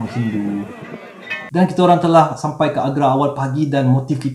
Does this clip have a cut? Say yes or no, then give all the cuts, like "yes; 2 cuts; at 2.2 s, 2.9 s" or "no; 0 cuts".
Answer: yes; 1 cut; at 1.0 s